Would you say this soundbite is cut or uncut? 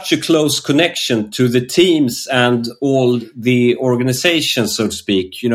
uncut